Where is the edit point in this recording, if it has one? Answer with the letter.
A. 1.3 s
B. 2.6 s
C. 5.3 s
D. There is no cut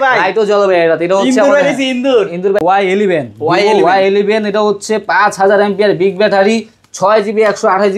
B